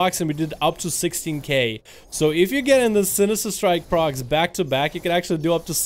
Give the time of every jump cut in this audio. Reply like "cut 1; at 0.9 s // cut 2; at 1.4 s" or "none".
none